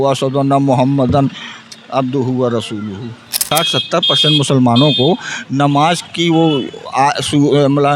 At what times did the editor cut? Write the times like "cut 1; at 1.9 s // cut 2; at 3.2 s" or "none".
cut 1; at 3.5 s